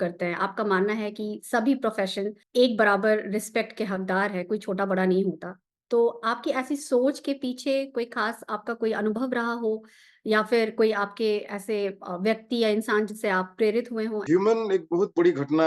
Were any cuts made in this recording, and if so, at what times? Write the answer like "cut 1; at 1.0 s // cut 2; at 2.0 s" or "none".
cut 1; at 2.4 s // cut 2; at 14.2 s